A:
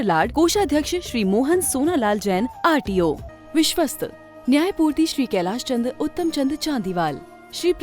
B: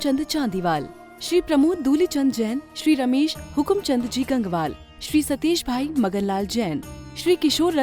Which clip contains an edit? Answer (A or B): A